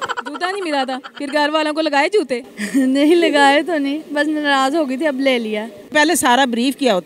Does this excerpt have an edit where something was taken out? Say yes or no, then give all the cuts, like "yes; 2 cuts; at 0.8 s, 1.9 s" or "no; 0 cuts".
yes; 1 cut; at 5.9 s